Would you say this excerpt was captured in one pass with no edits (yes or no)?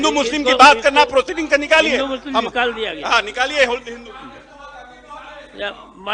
yes